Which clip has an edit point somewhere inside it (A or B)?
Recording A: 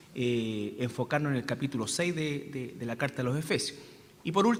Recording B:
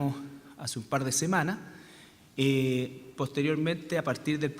B